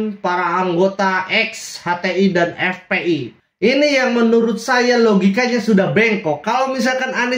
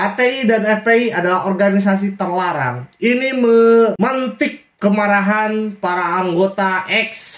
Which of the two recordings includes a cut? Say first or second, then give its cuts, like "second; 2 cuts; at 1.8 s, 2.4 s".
first; 1 cut; at 3.4 s